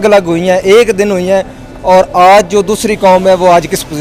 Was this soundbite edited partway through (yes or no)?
no